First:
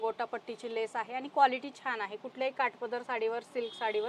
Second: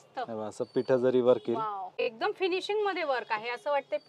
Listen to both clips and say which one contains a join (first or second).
second